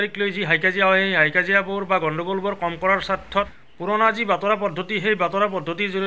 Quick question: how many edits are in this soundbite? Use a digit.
1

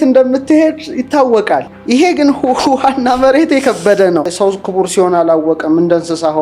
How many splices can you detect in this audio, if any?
1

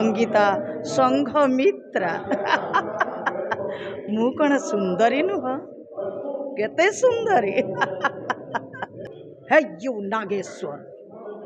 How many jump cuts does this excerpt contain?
1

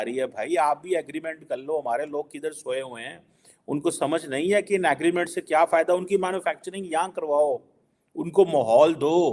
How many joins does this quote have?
0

